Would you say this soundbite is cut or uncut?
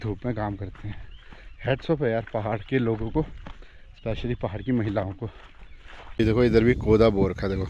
uncut